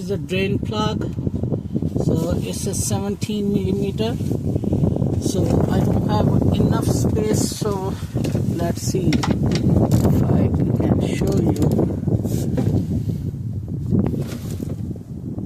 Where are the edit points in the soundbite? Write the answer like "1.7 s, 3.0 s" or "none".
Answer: none